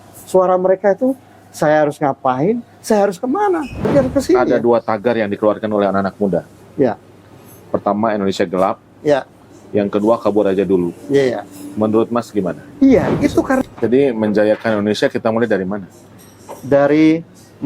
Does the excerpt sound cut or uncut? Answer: cut